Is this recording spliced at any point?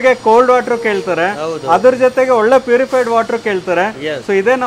no; 0 cuts

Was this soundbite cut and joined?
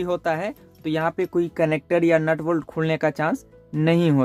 no; 0 cuts

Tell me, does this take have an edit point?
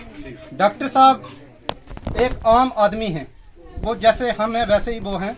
no; 0 cuts

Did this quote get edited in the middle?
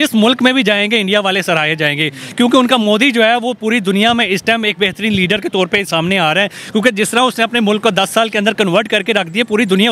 no; 0 cuts

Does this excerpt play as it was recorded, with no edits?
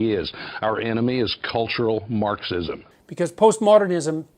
no; 1 cut; at 2.8 s

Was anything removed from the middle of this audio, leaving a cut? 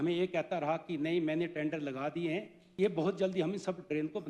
yes; 1 cut; at 2.6 s

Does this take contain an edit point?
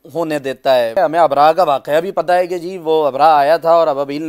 yes; 1 cut; at 0.9 s

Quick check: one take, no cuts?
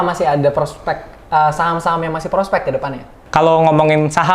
no; 1 cut; at 3.2 s

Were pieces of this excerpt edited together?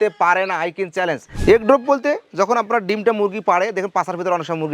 yes; 1 cut; at 1.3 s

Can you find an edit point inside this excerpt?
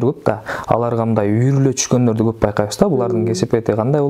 no; 0 cuts

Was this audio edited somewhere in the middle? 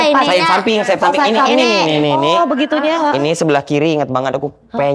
no; 0 cuts

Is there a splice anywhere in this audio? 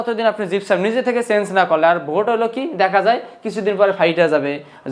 no; 0 cuts

